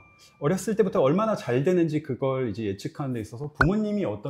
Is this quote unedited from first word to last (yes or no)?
yes